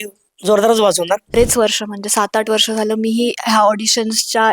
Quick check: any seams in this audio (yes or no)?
yes